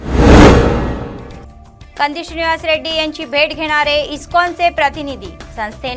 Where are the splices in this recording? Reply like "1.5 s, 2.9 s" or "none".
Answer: 0.9 s